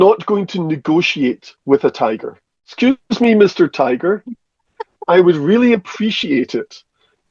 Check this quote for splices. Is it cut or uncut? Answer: cut